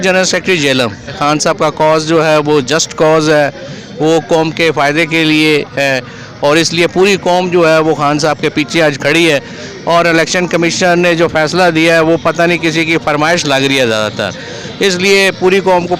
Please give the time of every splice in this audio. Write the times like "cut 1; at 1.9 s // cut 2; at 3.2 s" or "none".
cut 1; at 1.2 s